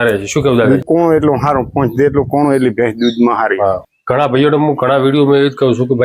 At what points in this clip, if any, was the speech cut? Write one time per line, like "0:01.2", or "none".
0:00.8
0:03.9

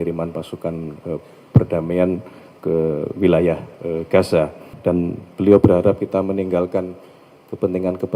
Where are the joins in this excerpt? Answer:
0:04.6

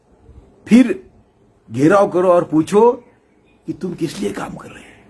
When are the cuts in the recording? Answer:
none

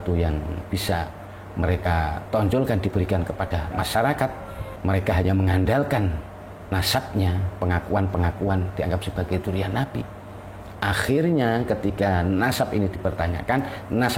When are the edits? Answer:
none

